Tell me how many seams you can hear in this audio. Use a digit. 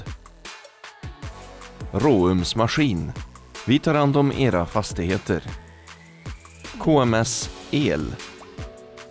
1